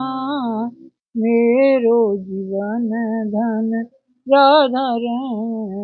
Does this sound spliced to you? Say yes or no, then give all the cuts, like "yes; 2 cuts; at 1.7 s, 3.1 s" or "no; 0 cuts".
no; 0 cuts